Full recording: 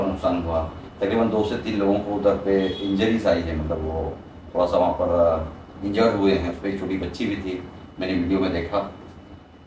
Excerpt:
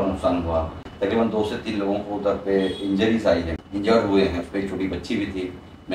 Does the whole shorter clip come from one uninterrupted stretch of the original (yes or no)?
no